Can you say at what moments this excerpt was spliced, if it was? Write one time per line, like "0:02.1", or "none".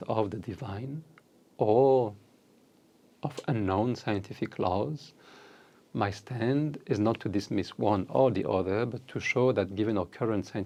none